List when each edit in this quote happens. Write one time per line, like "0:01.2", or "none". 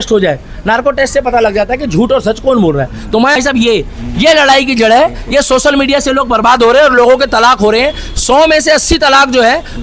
0:03.4